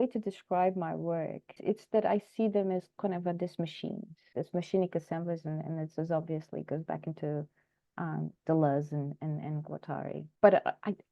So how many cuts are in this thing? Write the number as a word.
three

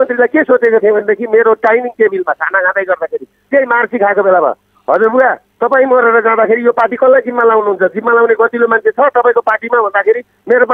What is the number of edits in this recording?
one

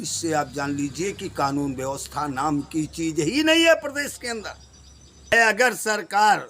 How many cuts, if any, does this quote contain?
one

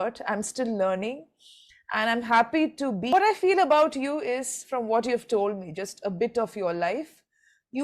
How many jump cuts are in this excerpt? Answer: one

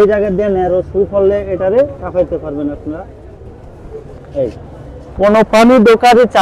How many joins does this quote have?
one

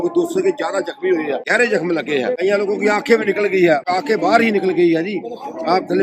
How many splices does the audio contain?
three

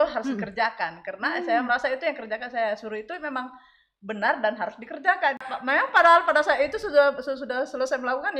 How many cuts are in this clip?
one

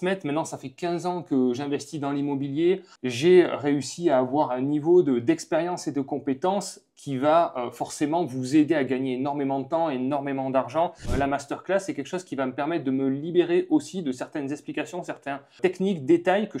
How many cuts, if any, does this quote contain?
three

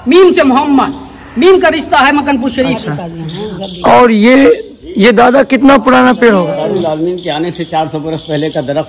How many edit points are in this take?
two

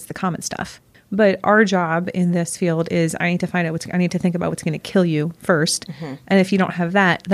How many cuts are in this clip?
one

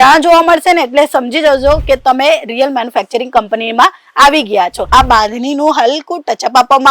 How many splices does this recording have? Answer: one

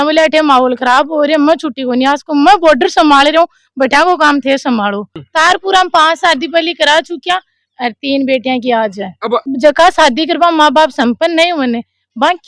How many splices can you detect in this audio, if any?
two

